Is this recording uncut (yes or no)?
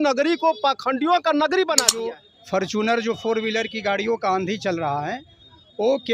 no